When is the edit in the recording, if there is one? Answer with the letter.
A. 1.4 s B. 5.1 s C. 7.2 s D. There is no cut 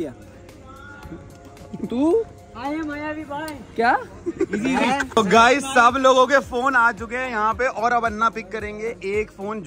B